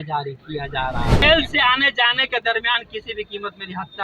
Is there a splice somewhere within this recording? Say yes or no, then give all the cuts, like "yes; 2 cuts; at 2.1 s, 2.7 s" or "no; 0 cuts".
yes; 1 cut; at 1.2 s